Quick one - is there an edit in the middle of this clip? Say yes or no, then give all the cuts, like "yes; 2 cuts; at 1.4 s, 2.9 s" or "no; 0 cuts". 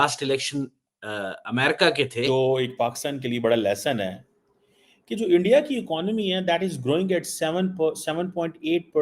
yes; 1 cut; at 2.2 s